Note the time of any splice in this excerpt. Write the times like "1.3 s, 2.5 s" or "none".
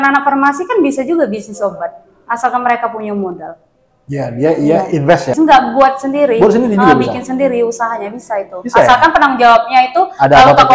none